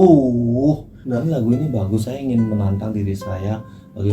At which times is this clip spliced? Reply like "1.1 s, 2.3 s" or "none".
0.9 s

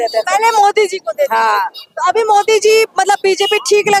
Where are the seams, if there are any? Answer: none

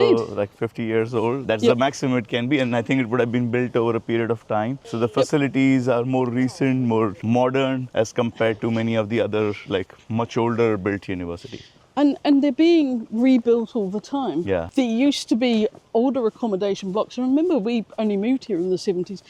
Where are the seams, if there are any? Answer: none

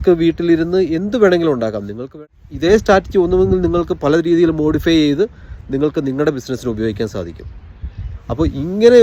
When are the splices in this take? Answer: 2.0 s

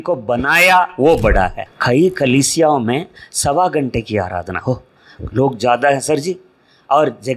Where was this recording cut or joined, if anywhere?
1.7 s

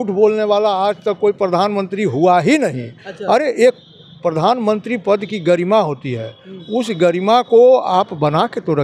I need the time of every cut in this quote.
none

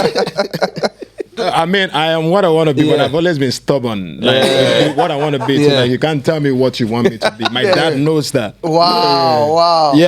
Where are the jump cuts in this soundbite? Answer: 1.4 s

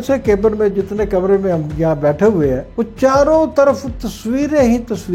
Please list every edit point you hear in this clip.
2.7 s

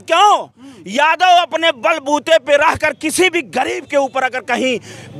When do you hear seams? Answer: none

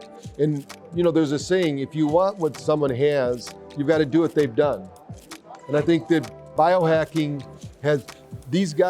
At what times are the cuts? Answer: none

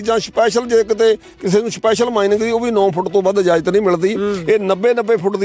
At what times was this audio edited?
none

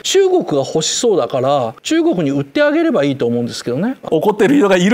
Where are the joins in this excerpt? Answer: 1.8 s, 4.0 s

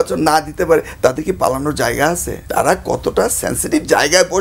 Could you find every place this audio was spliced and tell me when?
2.3 s

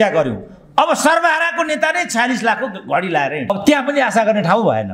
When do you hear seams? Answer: none

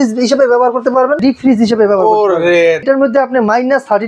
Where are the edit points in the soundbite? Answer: 1.2 s, 2.8 s

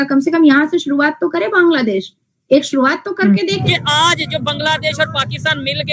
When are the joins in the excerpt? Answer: 3.6 s

